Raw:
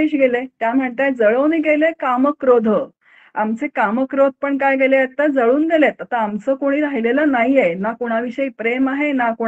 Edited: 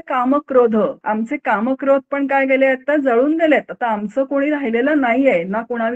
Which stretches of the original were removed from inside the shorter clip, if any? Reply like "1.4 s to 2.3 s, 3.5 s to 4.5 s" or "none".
2.9 s to 3.3 s